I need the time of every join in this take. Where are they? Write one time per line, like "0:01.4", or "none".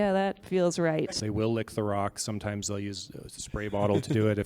0:01.2